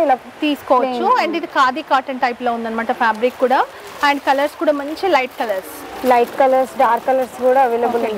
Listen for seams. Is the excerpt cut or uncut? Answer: uncut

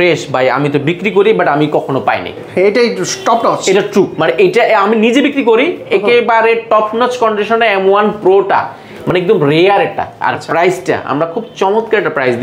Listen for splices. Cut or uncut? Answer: uncut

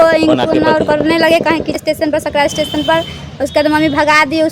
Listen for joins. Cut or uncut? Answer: cut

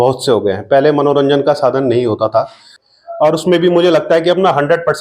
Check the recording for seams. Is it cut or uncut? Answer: cut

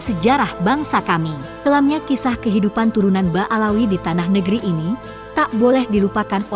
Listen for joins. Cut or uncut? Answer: cut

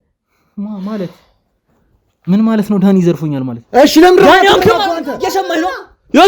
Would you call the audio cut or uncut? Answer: cut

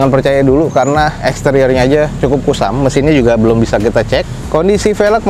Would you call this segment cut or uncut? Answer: uncut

